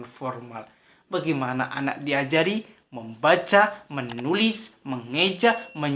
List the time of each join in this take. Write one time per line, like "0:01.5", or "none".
none